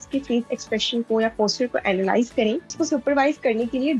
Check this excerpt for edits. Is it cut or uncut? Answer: cut